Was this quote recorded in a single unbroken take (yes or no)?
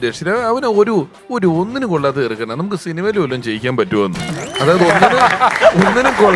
no